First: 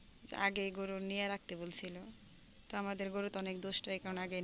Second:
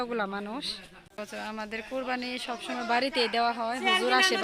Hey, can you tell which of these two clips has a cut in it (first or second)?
second